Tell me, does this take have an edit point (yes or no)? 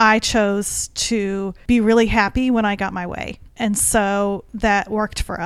yes